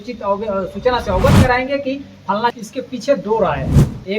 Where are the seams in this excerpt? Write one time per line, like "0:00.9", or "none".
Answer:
0:02.5